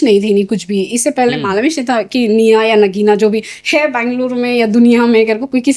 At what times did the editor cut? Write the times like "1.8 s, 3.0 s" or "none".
none